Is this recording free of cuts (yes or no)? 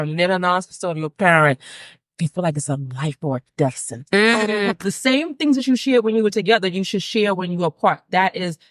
no